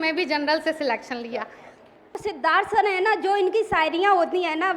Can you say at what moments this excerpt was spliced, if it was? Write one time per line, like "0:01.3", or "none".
0:02.2